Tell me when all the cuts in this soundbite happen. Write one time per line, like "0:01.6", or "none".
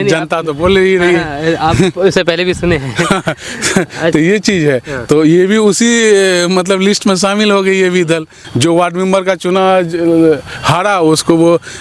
0:08.4